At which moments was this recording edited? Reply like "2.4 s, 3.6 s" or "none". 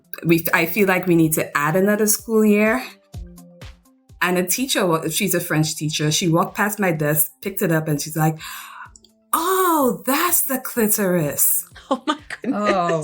3.4 s